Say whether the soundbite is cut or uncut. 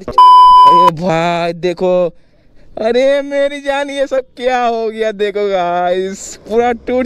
cut